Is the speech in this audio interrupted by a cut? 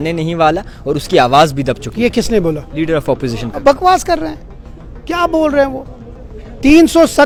no; 0 cuts

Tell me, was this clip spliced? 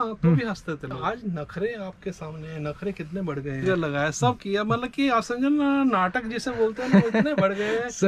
yes; 2 cuts; at 1.0 s, 3.6 s

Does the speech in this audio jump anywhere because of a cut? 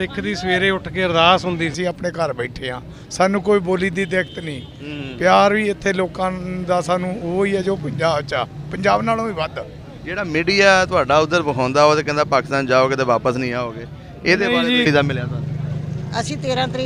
yes; 2 cuts; at 1.8 s, 14.8 s

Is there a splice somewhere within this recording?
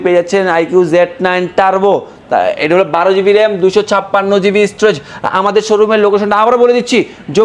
no; 0 cuts

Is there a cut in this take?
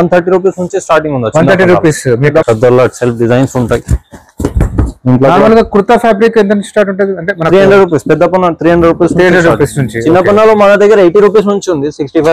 yes; 1 cut; at 2.4 s

